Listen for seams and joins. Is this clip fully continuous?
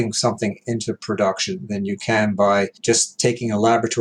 no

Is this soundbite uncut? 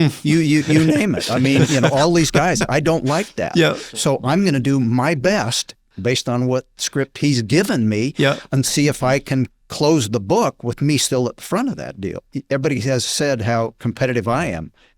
no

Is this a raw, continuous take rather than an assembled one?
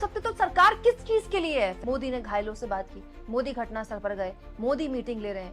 no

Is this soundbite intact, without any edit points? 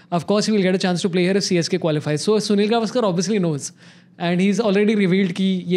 yes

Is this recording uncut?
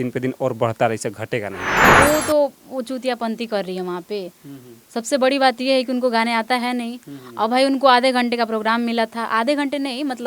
no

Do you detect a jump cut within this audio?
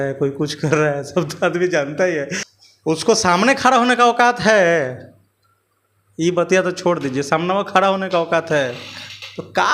yes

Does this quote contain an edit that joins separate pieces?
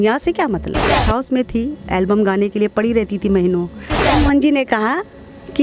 yes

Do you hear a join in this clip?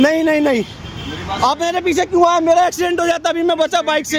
no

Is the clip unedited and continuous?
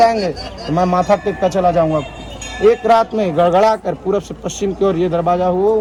yes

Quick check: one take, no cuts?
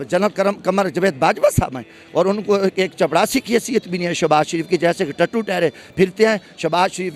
yes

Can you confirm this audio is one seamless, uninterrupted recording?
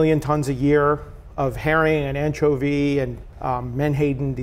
no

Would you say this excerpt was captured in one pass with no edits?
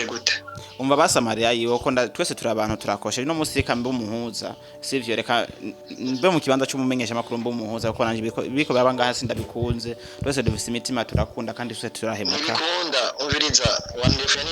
yes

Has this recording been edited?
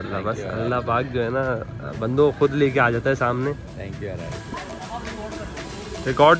yes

